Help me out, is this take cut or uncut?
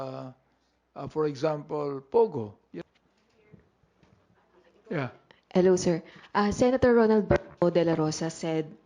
cut